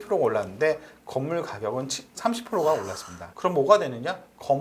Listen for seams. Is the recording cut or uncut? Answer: uncut